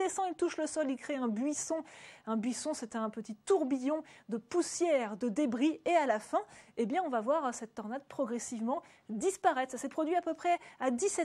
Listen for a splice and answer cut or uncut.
cut